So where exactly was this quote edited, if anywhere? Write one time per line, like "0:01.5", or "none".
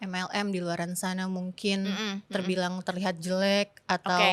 none